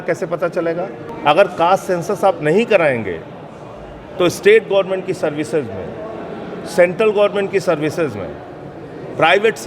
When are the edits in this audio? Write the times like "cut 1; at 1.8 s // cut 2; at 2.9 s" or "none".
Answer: cut 1; at 1.0 s